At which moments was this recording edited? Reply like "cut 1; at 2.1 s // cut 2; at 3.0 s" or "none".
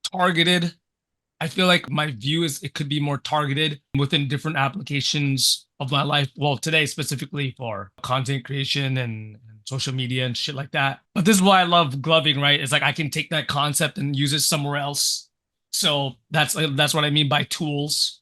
cut 1; at 1.9 s // cut 2; at 3.9 s // cut 3; at 8.0 s